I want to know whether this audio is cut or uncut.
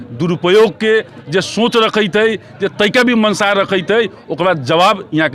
uncut